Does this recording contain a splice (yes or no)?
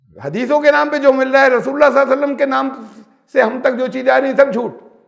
no